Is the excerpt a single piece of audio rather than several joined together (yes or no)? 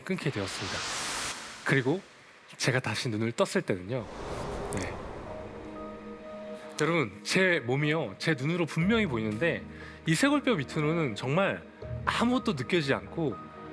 no